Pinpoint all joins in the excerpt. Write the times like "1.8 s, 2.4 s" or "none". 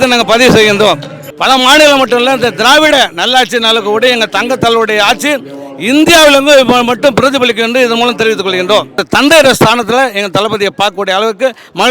1.3 s, 9.0 s